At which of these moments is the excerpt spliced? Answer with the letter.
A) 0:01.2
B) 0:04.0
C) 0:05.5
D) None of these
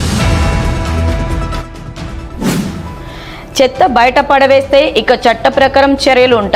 A